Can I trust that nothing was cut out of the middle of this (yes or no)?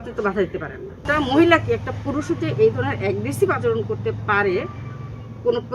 no